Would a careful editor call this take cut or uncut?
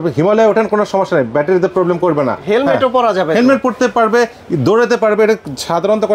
cut